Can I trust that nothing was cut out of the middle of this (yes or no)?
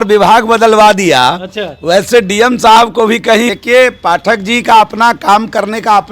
no